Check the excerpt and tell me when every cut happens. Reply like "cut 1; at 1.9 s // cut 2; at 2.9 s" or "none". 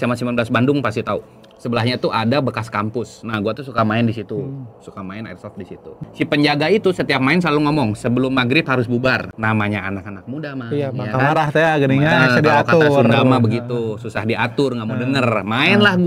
cut 1; at 6.0 s // cut 2; at 9.2 s